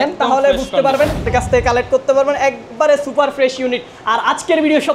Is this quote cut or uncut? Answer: cut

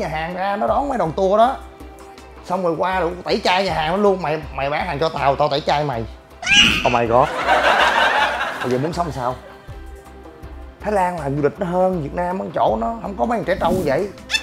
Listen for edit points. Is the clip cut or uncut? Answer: uncut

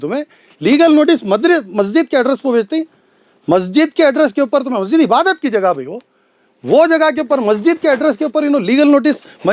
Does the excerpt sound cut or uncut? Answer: uncut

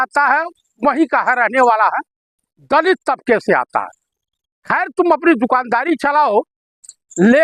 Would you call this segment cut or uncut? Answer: uncut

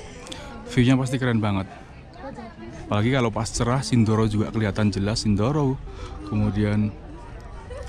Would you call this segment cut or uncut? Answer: uncut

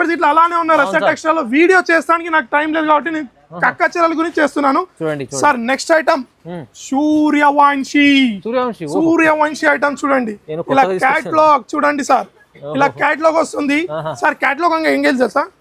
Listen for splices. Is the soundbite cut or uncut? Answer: uncut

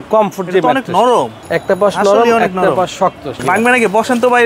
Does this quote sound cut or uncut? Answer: cut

